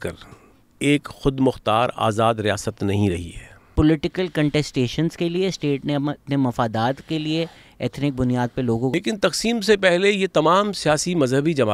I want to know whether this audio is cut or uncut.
cut